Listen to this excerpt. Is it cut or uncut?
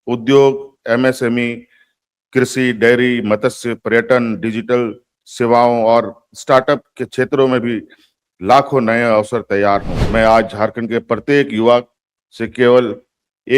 cut